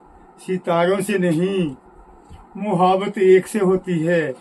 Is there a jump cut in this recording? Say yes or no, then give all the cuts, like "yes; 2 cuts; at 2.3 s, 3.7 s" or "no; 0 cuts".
no; 0 cuts